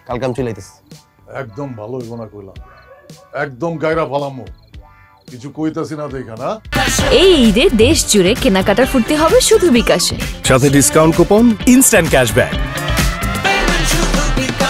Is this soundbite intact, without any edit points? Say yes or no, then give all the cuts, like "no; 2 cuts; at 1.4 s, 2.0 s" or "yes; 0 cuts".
no; 1 cut; at 6.7 s